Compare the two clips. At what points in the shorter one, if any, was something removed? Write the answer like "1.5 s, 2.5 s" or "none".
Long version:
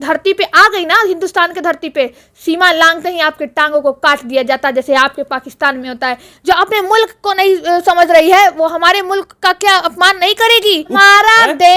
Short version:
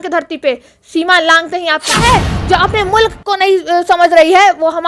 2.2 s